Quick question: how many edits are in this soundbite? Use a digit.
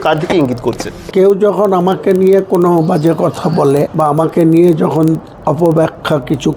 2